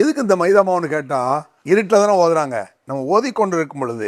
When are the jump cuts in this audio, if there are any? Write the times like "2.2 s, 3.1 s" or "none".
1.5 s

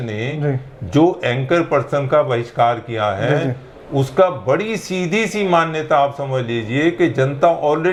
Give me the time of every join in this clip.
none

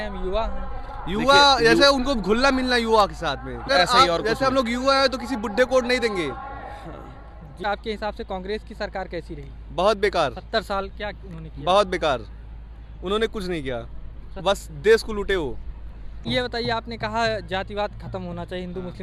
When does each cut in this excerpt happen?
3.7 s, 7.6 s, 16.2 s

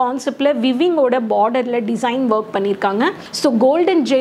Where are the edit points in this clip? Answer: 3.2 s

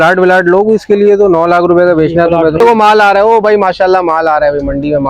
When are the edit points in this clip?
2.6 s

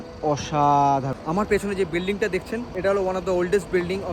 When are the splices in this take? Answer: 1.1 s, 2.7 s

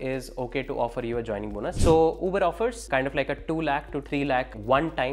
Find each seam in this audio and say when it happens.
1.8 s, 2.8 s, 4.2 s

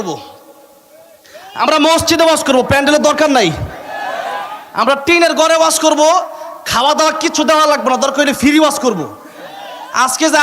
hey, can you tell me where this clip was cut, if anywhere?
none

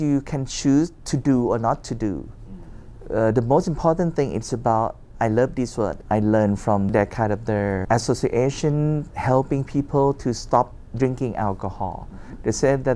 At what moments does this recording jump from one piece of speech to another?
none

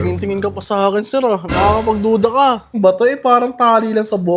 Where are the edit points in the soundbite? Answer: 2.7 s

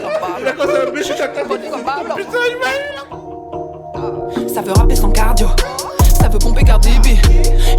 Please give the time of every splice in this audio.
2.9 s

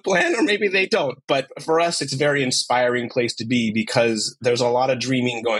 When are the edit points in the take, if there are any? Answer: 1.5 s, 4.4 s

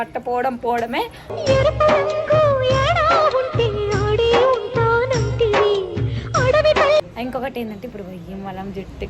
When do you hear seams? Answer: 7.1 s

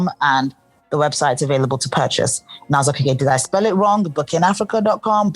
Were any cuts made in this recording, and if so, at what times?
none

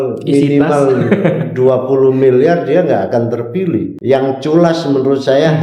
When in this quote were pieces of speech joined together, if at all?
3.9 s

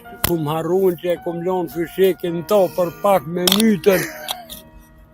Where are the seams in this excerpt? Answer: none

